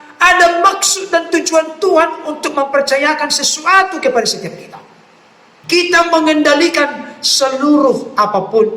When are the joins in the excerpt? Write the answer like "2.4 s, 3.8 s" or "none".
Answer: 5.6 s